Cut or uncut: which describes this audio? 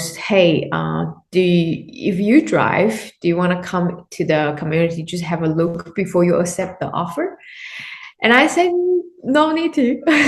uncut